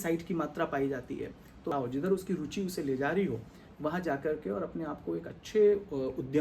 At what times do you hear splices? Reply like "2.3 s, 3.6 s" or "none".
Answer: 1.7 s